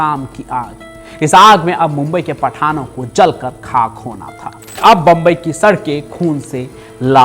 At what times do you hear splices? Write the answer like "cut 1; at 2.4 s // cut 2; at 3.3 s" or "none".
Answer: cut 1; at 4.8 s